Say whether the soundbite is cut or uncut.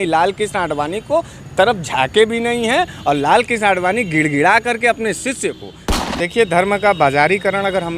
cut